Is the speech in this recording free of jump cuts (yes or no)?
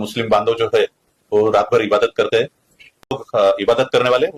no